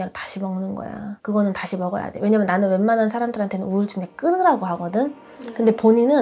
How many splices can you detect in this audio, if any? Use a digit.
0